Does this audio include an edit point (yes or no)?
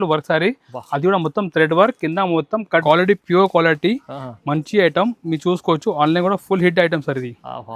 yes